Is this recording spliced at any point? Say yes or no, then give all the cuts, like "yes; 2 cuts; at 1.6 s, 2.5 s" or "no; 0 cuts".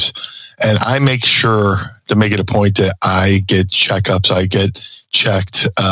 no; 0 cuts